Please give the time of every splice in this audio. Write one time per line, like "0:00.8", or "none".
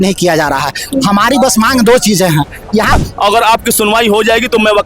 0:03.0